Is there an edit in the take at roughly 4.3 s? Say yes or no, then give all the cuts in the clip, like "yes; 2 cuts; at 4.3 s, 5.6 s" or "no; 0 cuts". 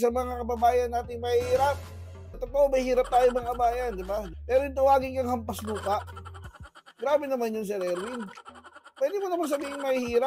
yes; 2 cuts; at 2.4 s, 4.3 s